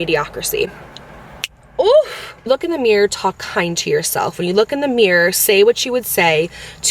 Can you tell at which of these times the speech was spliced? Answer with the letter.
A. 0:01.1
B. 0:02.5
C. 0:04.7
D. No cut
B